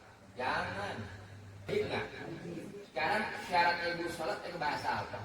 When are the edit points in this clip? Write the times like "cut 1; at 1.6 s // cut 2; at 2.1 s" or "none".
cut 1; at 1.7 s